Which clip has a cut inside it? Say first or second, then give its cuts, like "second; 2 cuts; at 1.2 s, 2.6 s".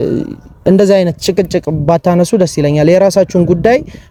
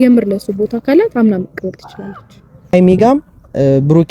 second; 1 cut; at 2.7 s